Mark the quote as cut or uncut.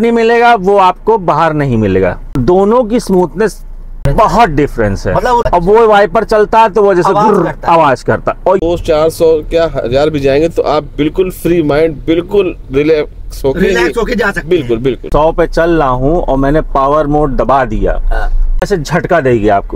cut